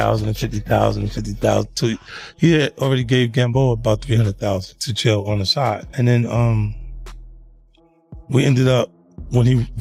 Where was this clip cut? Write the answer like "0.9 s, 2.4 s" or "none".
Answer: none